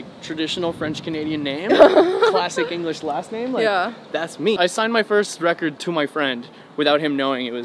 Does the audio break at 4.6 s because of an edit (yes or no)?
yes